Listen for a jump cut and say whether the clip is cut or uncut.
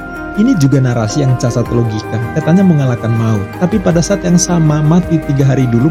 uncut